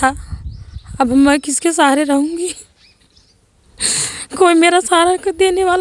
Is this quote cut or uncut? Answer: uncut